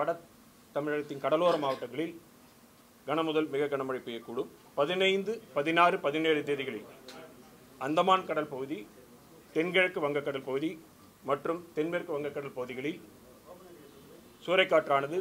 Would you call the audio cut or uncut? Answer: cut